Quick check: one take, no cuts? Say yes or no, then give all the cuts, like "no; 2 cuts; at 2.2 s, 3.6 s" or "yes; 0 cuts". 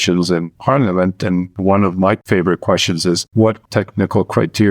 no; 3 cuts; at 1.5 s, 2.2 s, 3.3 s